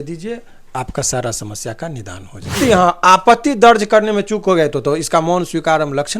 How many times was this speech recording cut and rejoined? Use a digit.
1